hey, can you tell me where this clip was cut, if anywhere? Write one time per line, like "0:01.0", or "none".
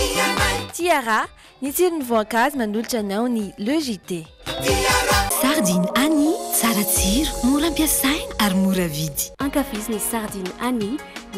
none

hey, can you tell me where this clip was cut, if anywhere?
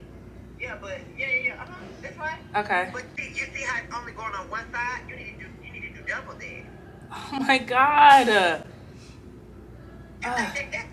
0:03.1

